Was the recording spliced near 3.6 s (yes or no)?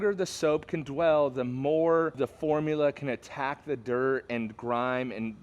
no